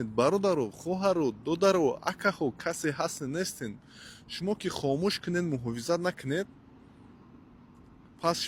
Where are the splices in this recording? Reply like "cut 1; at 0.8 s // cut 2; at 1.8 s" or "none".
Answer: none